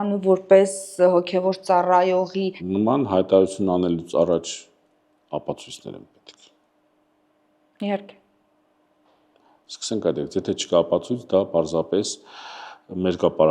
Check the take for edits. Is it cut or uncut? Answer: cut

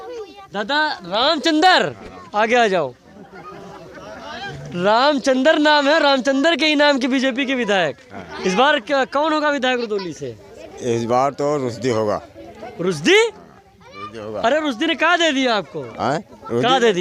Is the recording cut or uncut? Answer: uncut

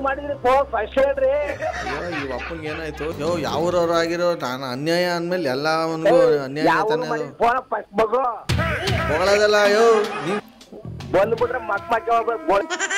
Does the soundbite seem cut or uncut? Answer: cut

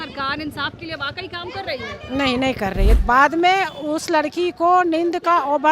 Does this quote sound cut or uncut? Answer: cut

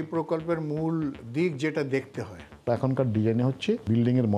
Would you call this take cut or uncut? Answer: cut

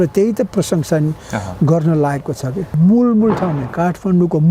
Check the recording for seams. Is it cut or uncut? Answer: cut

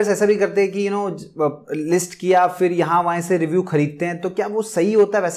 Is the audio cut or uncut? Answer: uncut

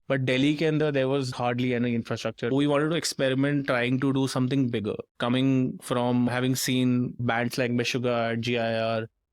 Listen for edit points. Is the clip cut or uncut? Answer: cut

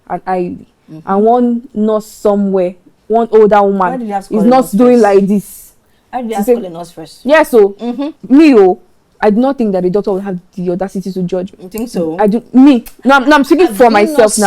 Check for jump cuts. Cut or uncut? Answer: cut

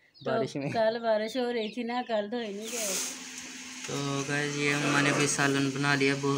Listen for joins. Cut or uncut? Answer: cut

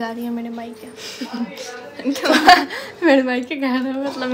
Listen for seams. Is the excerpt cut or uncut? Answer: uncut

